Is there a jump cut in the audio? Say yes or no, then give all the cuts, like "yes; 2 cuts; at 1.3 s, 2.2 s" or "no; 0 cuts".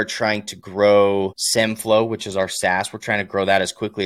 no; 0 cuts